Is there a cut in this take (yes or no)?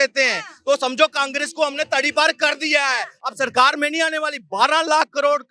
no